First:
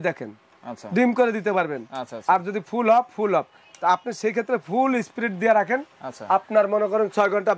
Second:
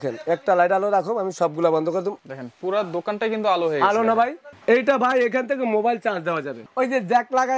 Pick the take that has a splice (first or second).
second